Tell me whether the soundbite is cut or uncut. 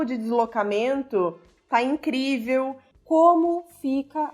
cut